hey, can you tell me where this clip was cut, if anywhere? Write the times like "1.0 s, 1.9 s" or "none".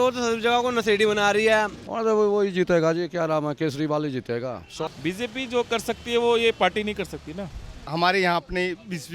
1.8 s, 4.9 s, 7.8 s